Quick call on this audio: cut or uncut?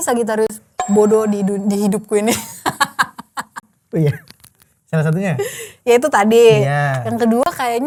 uncut